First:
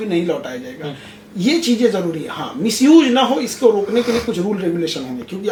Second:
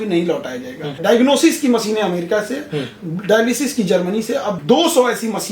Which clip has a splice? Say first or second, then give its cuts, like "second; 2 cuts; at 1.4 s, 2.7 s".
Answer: second; 2 cuts; at 1.0 s, 4.6 s